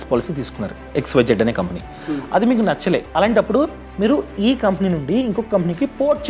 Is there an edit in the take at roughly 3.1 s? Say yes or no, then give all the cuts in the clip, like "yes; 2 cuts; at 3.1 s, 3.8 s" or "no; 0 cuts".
yes; 1 cut; at 3.1 s